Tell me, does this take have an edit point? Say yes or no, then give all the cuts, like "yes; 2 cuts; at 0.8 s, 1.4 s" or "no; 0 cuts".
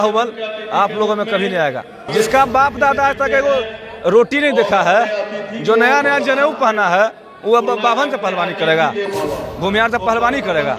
yes; 2 cuts; at 2.0 s, 9.1 s